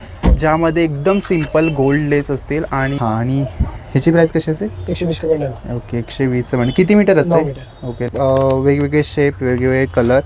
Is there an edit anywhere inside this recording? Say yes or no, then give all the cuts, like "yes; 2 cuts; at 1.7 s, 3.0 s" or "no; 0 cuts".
yes; 2 cuts; at 3.0 s, 8.1 s